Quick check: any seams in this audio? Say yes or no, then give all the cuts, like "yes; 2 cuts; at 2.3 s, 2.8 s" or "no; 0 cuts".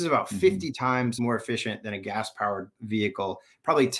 yes; 2 cuts; at 1.2 s, 2.8 s